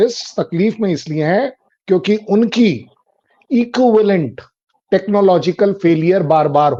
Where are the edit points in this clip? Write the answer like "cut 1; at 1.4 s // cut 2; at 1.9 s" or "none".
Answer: none